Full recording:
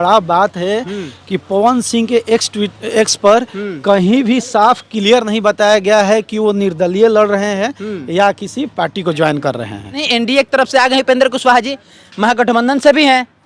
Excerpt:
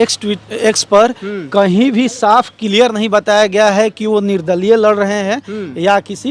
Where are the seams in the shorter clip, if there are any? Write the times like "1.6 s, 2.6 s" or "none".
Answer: none